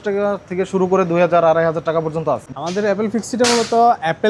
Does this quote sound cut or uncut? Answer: cut